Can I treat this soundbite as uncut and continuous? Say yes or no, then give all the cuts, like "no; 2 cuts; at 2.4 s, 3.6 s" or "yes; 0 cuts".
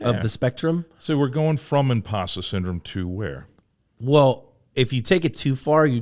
yes; 0 cuts